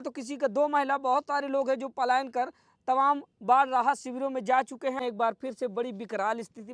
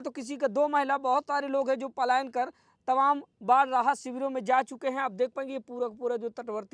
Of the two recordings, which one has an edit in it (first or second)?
first